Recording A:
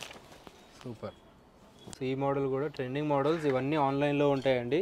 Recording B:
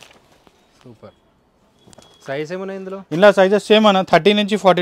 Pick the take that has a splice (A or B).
A